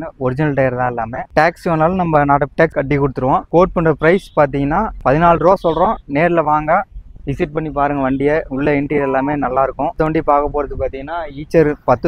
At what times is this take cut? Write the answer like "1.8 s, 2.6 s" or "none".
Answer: none

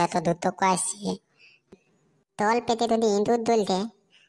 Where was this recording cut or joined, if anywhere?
1.8 s

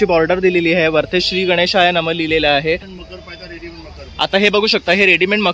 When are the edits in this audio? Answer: 2.9 s

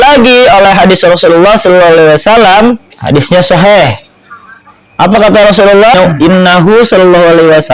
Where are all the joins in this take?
2.9 s, 5.9 s

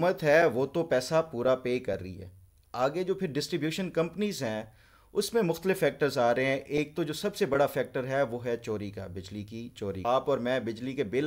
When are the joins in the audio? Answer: 10.0 s

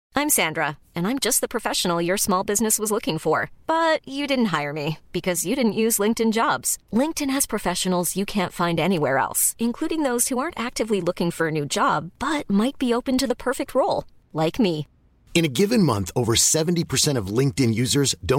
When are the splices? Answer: none

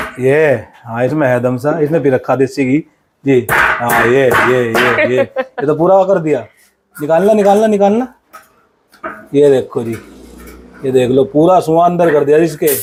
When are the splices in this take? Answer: none

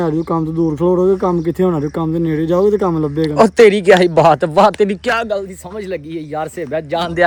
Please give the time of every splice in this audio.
none

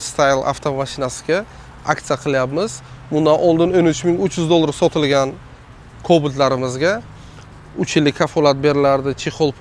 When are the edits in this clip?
none

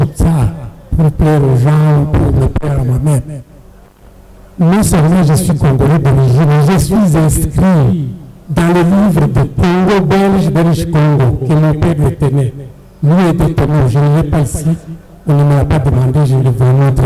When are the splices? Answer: none

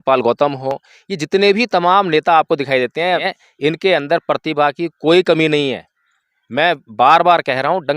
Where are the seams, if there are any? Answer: 3.3 s

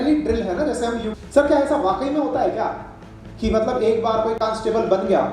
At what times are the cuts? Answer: 1.2 s

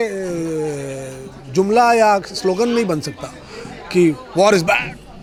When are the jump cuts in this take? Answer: none

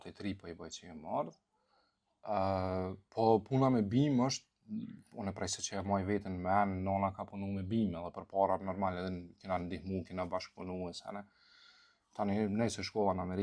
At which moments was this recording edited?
none

